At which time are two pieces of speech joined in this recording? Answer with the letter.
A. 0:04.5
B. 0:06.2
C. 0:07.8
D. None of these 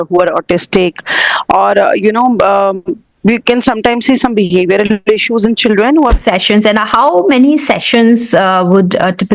B